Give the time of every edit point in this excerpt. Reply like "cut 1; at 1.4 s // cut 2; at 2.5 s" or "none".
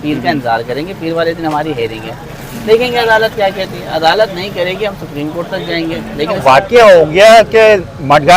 cut 1; at 6.3 s